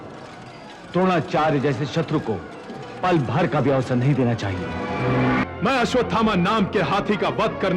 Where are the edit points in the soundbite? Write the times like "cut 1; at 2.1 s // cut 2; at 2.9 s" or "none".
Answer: cut 1; at 5.4 s